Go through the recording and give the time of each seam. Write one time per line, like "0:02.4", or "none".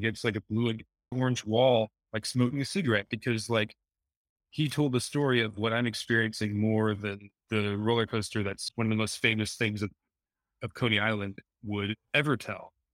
0:01.1
0:08.6